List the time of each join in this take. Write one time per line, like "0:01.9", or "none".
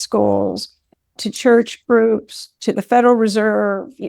0:01.2